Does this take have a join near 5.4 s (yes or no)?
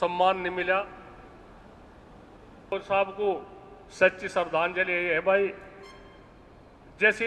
no